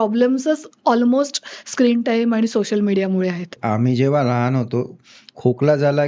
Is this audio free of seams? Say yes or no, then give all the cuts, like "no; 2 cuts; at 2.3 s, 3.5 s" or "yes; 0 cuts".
no; 1 cut; at 3.5 s